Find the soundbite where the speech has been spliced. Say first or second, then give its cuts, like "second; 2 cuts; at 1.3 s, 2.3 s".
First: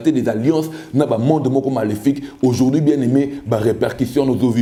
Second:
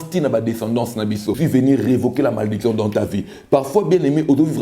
second; 1 cut; at 1.4 s